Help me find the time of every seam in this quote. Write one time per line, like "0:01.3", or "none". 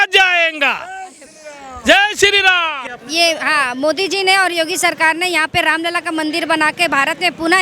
0:02.8